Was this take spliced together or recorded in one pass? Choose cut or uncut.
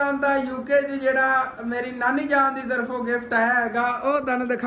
uncut